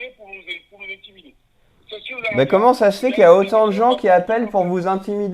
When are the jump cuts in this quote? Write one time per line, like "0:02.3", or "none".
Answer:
none